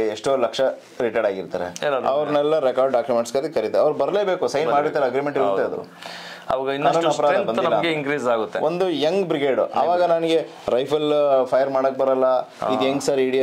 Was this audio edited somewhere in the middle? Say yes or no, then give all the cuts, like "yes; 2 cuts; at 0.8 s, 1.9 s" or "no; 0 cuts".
no; 0 cuts